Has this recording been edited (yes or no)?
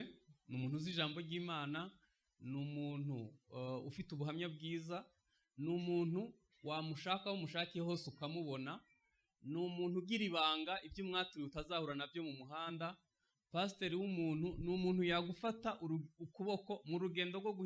no